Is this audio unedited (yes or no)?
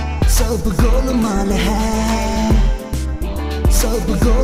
yes